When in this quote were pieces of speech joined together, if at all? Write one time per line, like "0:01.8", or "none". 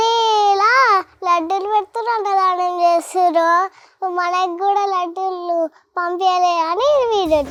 none